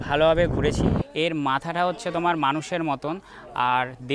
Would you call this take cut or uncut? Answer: cut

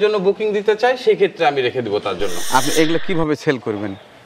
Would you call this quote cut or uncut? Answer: cut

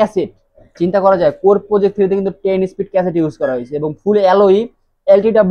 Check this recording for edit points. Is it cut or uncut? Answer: uncut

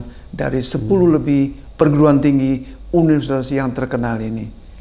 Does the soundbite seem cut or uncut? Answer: cut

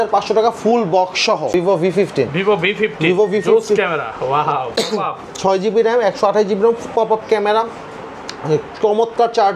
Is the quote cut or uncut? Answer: cut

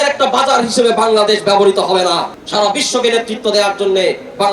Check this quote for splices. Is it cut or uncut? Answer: cut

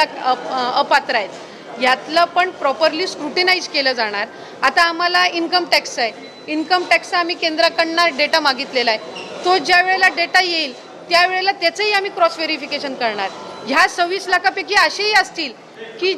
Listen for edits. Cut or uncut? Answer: uncut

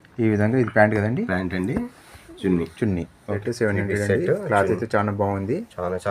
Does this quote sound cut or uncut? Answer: cut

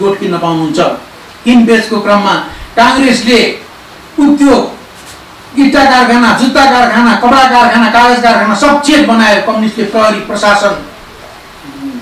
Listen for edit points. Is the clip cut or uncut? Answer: uncut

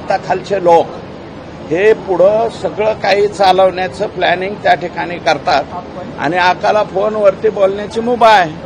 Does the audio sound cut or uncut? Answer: uncut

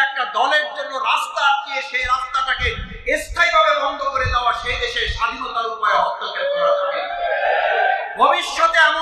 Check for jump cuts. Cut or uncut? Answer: uncut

